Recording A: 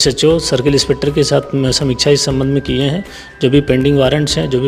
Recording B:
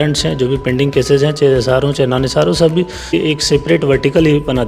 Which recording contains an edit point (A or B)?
B